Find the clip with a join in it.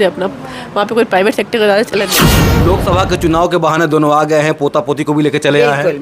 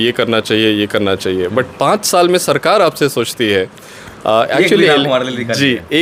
first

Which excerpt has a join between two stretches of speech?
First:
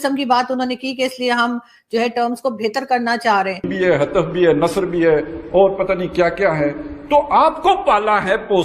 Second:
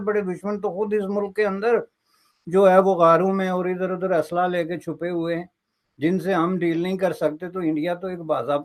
first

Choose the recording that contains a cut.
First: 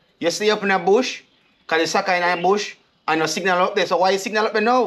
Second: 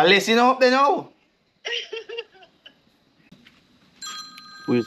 second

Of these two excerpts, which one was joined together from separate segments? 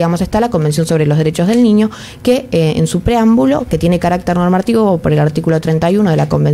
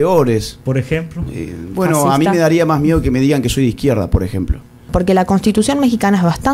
second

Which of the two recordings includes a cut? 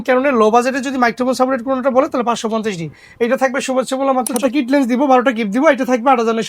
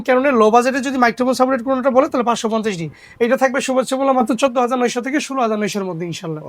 first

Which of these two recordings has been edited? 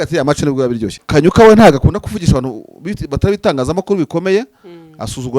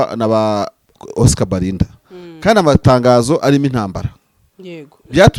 first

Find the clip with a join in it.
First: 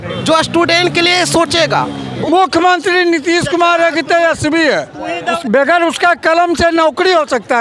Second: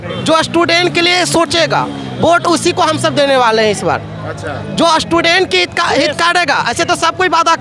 first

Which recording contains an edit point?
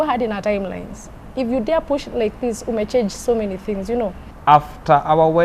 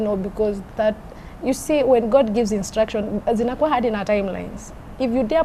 first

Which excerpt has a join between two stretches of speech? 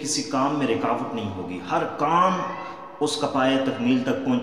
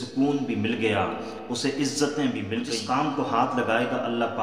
second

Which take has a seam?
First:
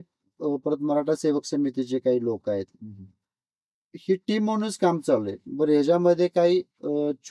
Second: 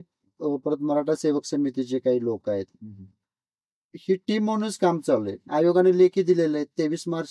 second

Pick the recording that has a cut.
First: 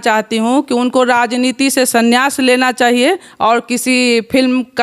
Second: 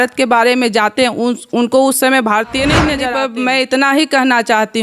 second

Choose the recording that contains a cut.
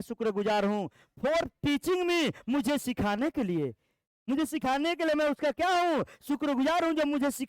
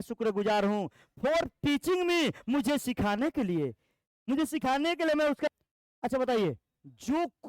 second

